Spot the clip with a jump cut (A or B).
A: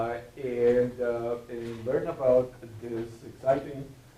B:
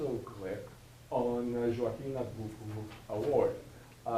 A